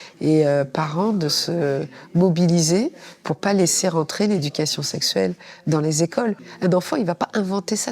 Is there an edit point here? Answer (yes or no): yes